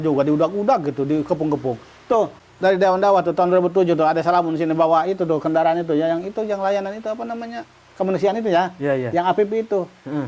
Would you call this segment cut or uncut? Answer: cut